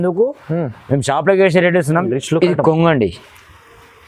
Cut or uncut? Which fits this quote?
cut